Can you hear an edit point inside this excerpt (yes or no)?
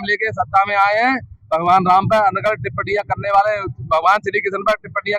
no